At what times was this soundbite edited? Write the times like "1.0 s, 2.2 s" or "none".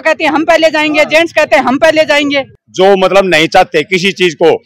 2.7 s